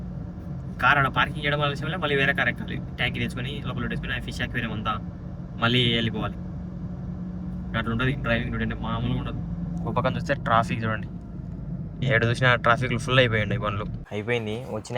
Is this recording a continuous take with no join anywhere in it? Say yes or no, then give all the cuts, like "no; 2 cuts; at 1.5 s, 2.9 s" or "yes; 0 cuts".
no; 1 cut; at 14.0 s